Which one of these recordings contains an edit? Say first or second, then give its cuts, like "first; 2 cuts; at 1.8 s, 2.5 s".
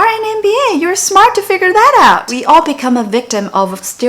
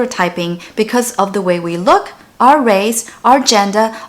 first; 1 cut; at 2.3 s